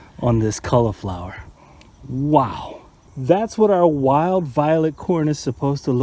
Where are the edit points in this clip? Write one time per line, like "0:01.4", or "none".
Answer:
0:02.9